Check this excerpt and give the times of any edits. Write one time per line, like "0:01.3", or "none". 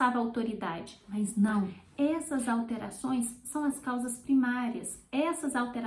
0:01.8